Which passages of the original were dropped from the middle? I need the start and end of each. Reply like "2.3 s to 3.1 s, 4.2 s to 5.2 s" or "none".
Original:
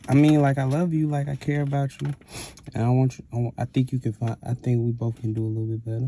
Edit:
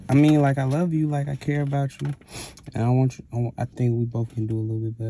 3.7 s to 4.6 s